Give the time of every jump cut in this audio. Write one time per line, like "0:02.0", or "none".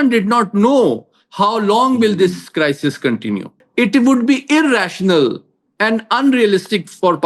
0:03.6